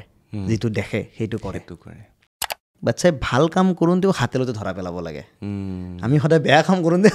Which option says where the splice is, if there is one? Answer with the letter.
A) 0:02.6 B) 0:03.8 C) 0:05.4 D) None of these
A